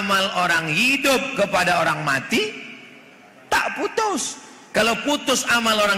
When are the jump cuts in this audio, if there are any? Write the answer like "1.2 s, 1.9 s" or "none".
none

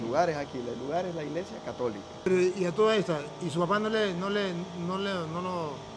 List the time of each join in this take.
2.3 s

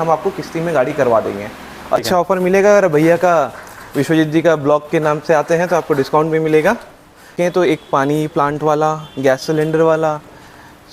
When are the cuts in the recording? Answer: 2.0 s, 7.3 s

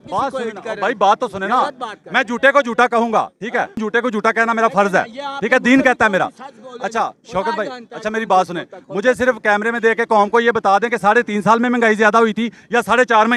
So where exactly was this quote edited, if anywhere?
none

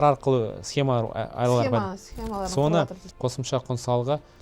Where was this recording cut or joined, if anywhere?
3.0 s

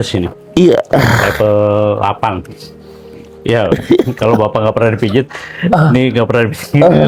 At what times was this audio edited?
none

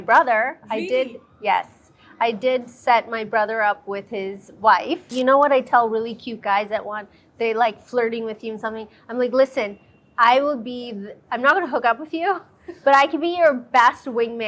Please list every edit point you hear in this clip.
5.1 s

